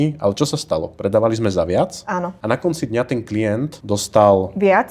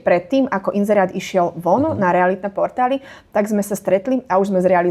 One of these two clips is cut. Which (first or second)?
first